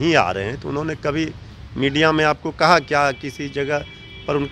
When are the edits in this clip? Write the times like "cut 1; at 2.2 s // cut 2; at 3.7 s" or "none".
none